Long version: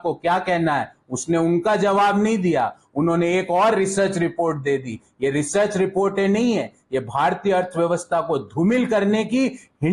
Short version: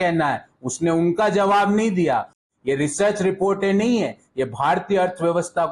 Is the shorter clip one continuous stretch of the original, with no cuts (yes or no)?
no